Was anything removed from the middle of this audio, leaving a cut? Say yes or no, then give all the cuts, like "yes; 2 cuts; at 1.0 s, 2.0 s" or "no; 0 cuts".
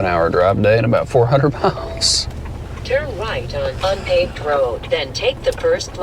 no; 0 cuts